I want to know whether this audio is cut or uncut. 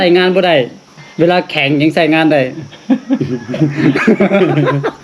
uncut